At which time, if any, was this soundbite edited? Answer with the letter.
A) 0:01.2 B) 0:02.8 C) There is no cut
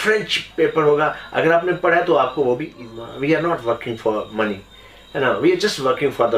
B